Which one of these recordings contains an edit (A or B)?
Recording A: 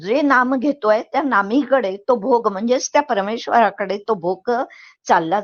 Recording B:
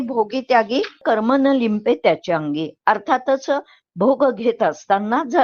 B